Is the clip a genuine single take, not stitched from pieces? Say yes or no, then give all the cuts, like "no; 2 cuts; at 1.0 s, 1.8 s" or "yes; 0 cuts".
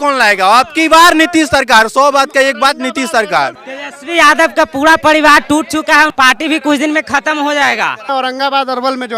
no; 3 cuts; at 3.6 s, 6.1 s, 8.1 s